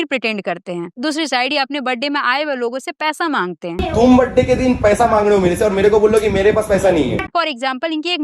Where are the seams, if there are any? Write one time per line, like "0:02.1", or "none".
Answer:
0:07.3